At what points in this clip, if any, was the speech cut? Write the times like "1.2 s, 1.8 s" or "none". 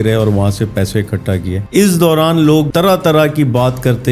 1.6 s, 2.7 s